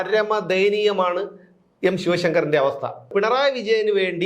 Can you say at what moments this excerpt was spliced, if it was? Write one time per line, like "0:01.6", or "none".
0:03.1